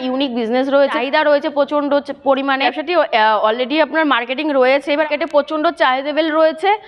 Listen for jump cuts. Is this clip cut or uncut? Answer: cut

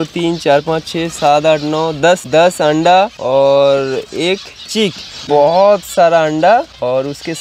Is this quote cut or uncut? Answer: uncut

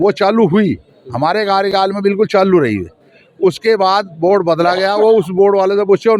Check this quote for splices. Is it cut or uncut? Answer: uncut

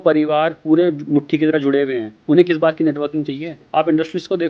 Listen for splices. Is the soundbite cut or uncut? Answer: cut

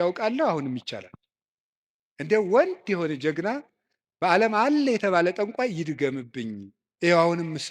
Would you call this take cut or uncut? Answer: cut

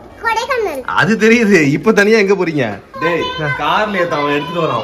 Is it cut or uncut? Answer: cut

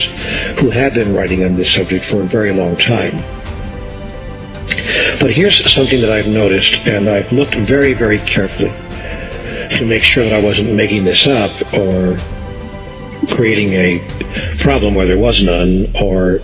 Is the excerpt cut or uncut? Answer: cut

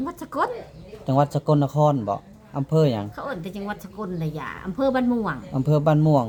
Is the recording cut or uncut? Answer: uncut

